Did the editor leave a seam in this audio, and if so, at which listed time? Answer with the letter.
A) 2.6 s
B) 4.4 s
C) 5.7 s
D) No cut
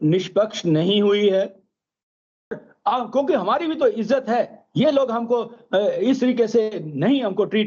A